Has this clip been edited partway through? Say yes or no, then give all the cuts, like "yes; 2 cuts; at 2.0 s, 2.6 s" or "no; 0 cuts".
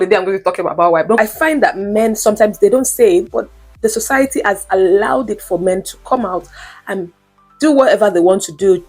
yes; 1 cut; at 1.2 s